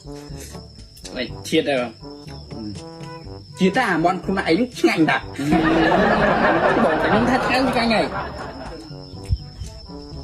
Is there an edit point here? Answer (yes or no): yes